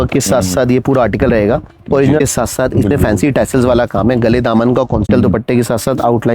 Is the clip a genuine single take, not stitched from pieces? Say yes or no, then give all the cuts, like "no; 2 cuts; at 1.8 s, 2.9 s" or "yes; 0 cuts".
no; 2 cuts; at 2.2 s, 5.1 s